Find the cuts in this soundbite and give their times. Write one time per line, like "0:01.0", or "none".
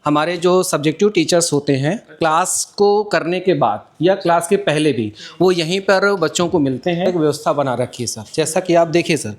0:07.1